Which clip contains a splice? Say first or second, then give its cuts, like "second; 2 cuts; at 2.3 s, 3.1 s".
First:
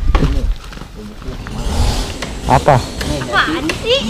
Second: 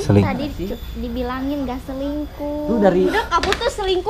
second; 1 cut; at 3.1 s